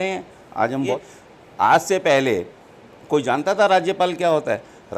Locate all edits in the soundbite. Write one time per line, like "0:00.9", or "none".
0:01.0